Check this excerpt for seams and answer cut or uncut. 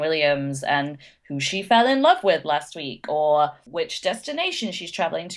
cut